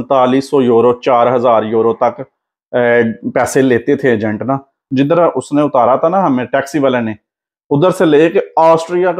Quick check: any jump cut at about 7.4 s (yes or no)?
no